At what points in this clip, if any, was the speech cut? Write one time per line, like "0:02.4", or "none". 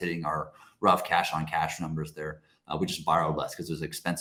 none